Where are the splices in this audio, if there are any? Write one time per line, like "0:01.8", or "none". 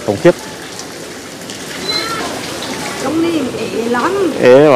0:03.0